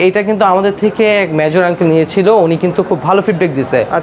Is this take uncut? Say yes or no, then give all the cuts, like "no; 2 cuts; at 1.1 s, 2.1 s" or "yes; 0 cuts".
yes; 0 cuts